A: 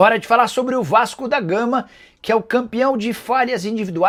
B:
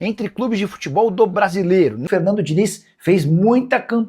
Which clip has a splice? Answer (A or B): B